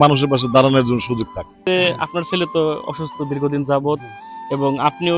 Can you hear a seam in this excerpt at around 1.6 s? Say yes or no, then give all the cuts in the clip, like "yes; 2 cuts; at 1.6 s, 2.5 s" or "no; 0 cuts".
yes; 1 cut; at 1.6 s